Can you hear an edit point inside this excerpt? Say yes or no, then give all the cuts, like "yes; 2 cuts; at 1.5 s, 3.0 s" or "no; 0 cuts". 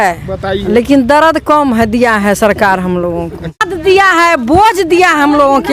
yes; 1 cut; at 3.7 s